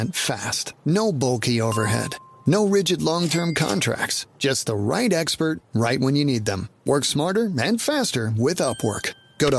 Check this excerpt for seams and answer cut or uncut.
uncut